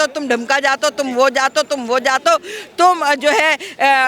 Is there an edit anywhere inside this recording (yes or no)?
no